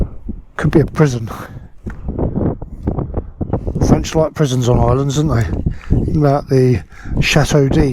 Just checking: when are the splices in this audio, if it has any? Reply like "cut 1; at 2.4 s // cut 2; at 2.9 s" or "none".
none